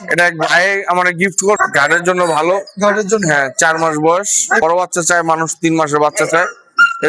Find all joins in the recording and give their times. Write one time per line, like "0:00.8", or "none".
0:01.6
0:04.6